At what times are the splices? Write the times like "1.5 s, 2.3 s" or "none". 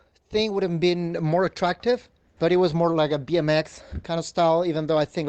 2.2 s